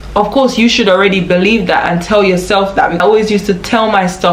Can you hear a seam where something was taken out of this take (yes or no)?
yes